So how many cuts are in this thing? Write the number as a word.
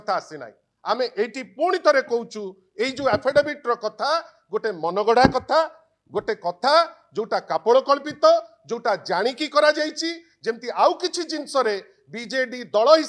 zero